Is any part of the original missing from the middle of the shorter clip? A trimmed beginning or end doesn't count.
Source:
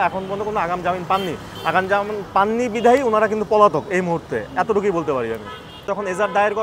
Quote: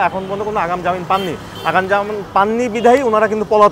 no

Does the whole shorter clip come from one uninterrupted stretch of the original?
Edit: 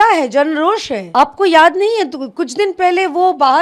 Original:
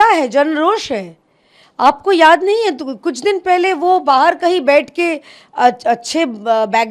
no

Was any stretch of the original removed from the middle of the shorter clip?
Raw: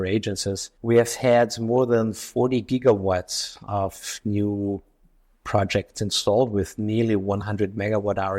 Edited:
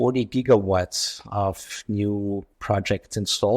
yes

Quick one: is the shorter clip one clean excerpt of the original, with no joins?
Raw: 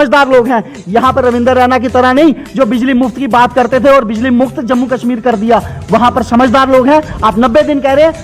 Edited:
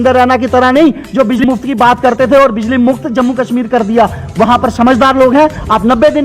no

